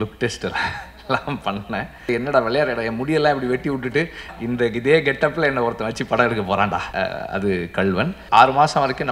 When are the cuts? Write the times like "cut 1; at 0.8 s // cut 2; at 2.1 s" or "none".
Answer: cut 1; at 2.1 s // cut 2; at 4.3 s // cut 3; at 6.9 s // cut 4; at 8.2 s